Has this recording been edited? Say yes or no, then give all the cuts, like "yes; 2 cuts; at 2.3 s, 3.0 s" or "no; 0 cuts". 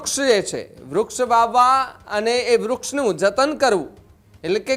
no; 0 cuts